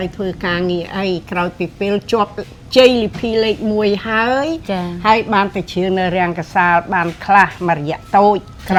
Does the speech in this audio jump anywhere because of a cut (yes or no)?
no